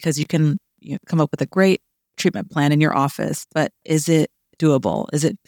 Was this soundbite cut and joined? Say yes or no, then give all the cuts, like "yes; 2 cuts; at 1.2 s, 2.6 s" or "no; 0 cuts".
no; 0 cuts